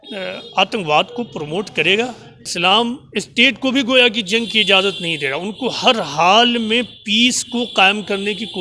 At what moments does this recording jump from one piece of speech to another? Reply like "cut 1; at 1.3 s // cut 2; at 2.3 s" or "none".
cut 1; at 2.5 s